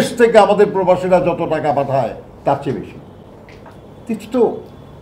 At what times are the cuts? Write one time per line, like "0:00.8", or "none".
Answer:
none

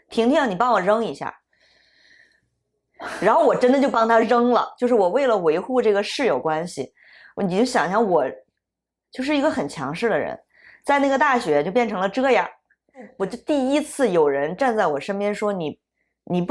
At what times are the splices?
0:13.1

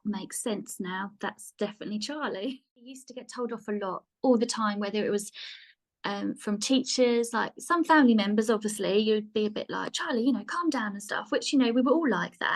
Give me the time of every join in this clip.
0:03.1

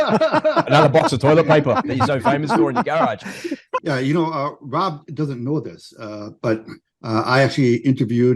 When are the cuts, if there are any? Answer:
0:03.8

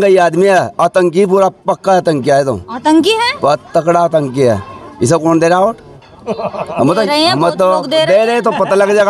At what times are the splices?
none

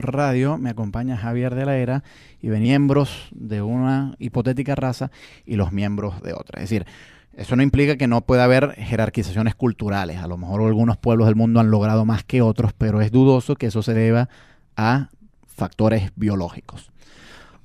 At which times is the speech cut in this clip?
none

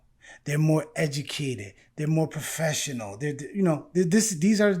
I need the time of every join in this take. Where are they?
none

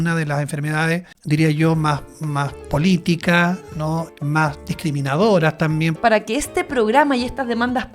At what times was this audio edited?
0:01.1
0:04.1
0:06.0

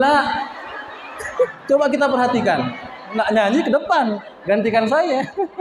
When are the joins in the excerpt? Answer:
0:01.5
0:03.1

